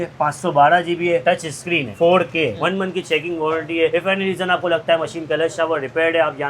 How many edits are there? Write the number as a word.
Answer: one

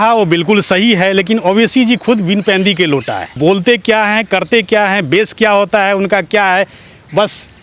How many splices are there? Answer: one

